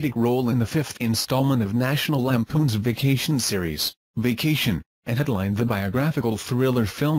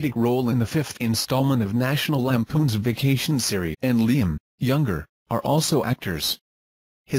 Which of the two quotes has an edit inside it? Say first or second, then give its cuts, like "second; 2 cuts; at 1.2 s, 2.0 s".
first; 1 cut; at 3.7 s